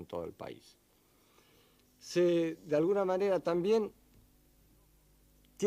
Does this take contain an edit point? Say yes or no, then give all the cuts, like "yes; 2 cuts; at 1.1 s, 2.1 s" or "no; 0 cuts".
yes; 1 cut; at 3.5 s